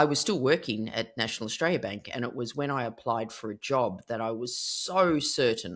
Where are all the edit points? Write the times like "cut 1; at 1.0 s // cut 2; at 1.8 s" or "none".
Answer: none